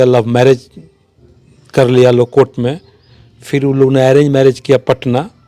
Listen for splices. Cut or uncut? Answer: uncut